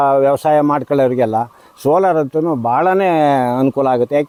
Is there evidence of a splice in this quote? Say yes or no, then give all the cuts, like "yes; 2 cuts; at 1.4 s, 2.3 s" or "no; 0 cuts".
no; 0 cuts